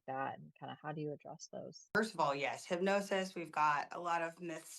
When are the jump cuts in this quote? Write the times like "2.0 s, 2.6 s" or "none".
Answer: 1.9 s